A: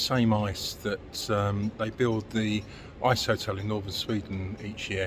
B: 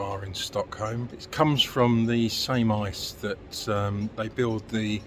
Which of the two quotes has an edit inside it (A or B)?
B